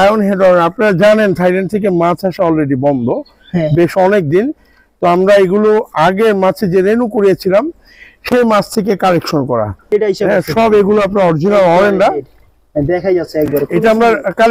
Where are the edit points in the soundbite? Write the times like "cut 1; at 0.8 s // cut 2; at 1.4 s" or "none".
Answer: cut 1; at 9.9 s